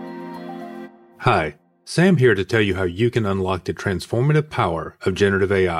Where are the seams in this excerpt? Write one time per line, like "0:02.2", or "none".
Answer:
0:01.0